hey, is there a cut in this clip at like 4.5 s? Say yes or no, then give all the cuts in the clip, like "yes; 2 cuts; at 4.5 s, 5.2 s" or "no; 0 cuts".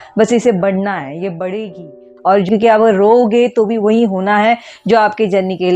no; 1 cut; at 2.5 s